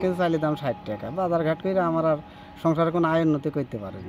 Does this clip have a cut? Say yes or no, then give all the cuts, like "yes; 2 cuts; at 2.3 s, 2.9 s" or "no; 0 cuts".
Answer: no; 0 cuts